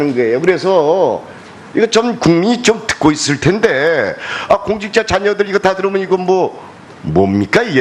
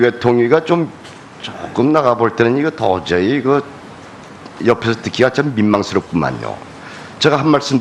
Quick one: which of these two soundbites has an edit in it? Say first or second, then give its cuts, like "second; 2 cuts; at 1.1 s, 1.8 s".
first; 1 cut; at 4.8 s